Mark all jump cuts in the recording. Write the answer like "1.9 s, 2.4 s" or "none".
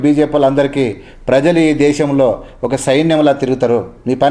none